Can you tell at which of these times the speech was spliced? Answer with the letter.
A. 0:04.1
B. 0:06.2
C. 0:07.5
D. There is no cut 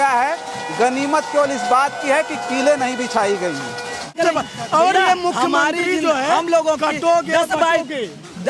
A